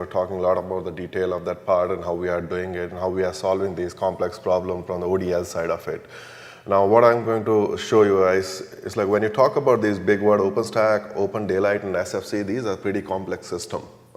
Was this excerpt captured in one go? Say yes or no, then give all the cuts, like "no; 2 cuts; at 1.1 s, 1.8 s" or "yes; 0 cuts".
yes; 0 cuts